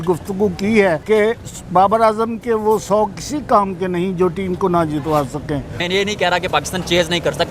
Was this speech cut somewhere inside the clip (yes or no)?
yes